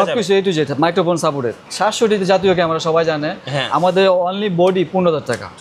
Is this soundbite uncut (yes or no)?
no